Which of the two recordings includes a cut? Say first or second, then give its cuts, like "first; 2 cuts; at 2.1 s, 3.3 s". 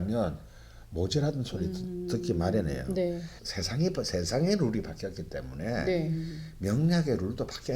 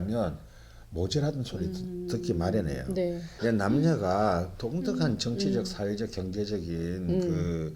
first; 1 cut; at 3.3 s